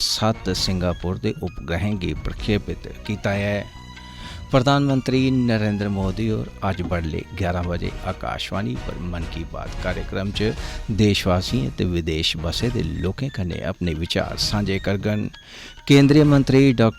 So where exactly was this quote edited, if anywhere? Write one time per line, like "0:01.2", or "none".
none